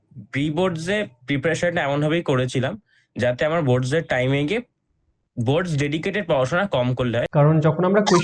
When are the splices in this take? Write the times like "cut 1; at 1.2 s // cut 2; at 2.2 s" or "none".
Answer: cut 1; at 7.3 s

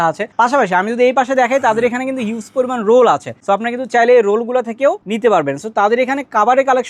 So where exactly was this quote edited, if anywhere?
none

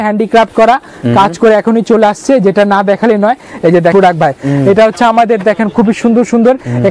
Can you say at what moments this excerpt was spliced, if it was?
cut 1; at 3.9 s

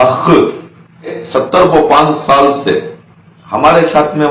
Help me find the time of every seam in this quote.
cut 1; at 1.2 s

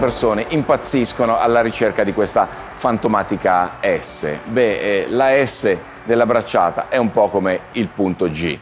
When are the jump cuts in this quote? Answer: none

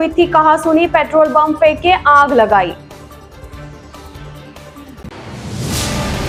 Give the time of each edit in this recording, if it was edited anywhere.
none

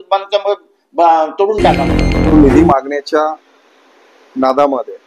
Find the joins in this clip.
cut 1; at 2.2 s

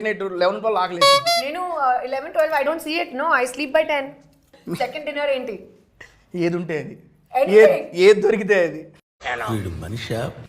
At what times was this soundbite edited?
cut 1; at 4.6 s

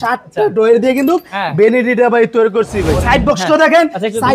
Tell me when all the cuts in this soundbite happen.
cut 1; at 2.9 s

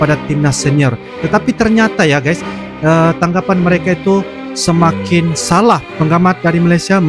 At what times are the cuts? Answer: cut 1; at 5.9 s

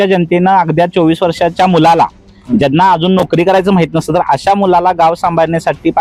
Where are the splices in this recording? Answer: none

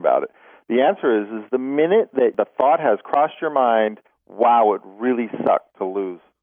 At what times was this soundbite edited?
cut 1; at 2.3 s

